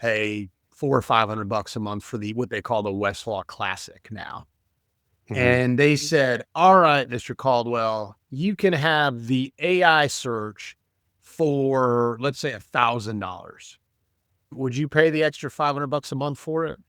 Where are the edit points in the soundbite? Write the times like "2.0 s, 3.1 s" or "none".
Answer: 14.5 s